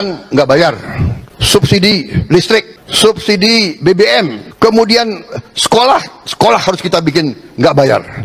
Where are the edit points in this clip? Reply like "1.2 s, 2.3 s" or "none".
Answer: 1.1 s, 2.8 s, 4.4 s